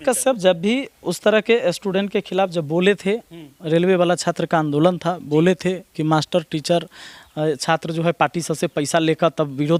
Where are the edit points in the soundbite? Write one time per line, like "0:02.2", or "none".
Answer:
none

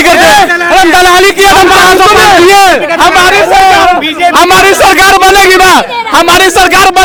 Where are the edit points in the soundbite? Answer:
none

